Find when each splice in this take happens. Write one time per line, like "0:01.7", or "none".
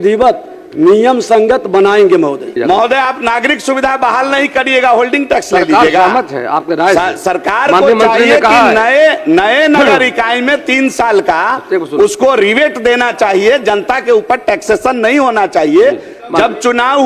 0:02.5